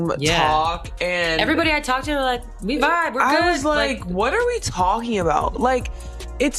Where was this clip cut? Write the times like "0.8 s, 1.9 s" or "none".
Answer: none